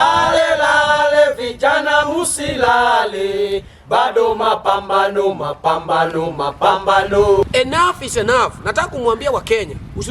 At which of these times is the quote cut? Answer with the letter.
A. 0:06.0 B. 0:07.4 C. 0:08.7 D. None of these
B